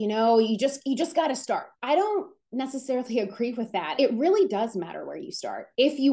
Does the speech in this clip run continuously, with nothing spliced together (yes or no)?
no